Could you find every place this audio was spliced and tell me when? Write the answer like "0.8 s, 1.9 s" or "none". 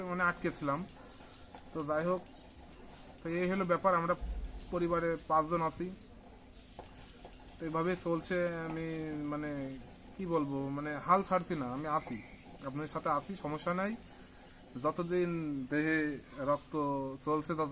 none